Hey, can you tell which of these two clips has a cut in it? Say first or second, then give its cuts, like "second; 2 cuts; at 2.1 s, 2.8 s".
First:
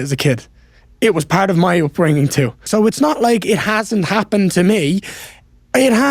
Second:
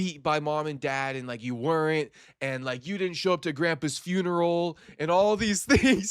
first; 1 cut; at 2.6 s